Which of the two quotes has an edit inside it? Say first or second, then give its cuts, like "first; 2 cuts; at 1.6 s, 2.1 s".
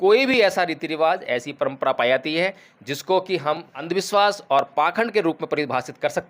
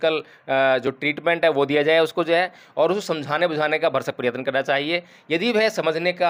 first; 1 cut; at 3.8 s